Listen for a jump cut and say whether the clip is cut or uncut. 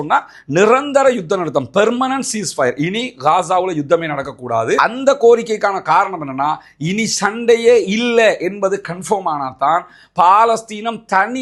uncut